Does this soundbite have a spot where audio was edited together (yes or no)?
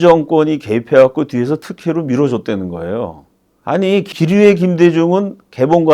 yes